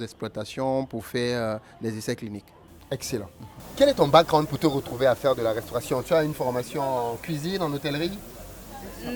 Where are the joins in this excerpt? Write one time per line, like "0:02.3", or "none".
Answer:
0:03.6